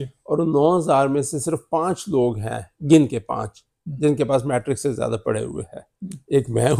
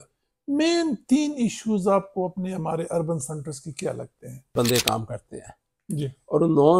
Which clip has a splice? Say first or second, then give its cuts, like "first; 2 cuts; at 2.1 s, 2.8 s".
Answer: second; 1 cut; at 4.5 s